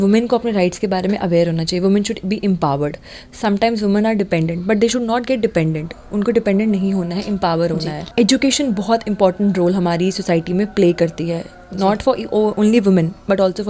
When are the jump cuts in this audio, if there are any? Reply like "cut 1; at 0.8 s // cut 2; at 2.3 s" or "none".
cut 1; at 8.0 s